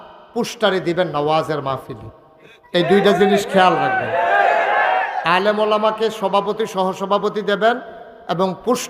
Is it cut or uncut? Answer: uncut